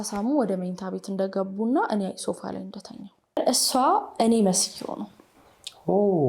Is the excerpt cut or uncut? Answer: cut